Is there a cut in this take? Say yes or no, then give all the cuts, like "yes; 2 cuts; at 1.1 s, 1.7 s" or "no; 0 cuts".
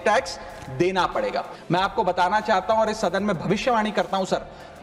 yes; 1 cut; at 1.5 s